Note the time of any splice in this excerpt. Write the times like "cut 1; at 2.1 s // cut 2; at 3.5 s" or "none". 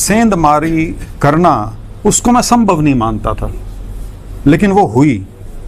none

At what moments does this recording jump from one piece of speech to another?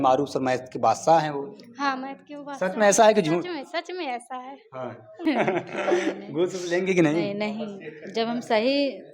cut 1; at 5.1 s

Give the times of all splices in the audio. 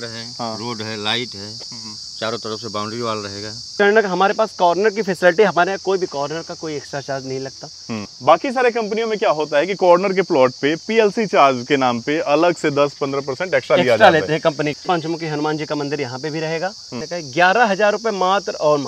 cut 1; at 3.7 s // cut 2; at 14.8 s // cut 3; at 17.0 s

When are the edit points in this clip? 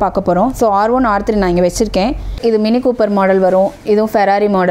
cut 1; at 2.4 s

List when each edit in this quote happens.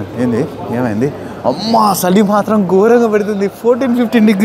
cut 1; at 1.6 s

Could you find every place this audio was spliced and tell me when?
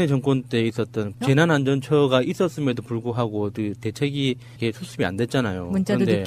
cut 1; at 2.9 s

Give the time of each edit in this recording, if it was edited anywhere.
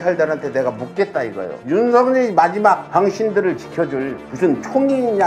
none

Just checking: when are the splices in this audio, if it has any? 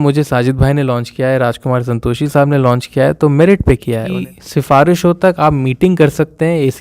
cut 1; at 4.1 s

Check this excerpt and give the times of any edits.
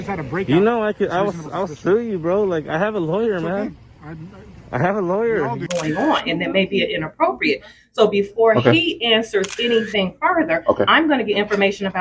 cut 1; at 5.6 s

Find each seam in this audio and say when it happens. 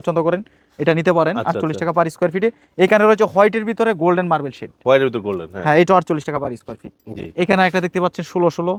none

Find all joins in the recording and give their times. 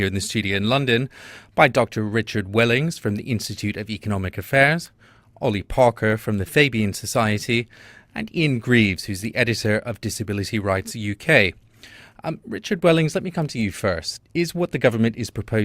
cut 1; at 8.6 s

